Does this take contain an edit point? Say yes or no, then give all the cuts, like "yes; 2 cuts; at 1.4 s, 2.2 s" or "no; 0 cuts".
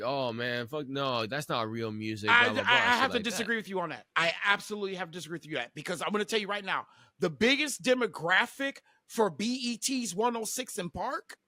no; 0 cuts